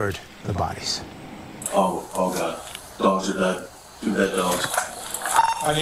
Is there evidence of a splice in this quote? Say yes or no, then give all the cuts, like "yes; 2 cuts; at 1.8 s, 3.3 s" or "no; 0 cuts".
no; 0 cuts